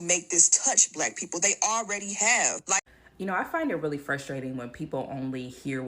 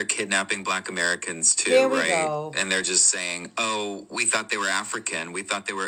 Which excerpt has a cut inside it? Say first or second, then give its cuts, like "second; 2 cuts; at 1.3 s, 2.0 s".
first; 1 cut; at 2.8 s